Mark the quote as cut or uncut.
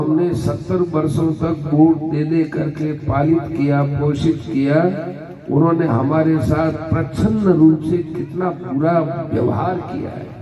uncut